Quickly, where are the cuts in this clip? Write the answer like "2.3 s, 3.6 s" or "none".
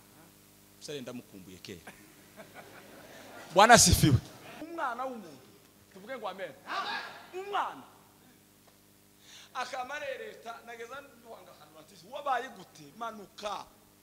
4.6 s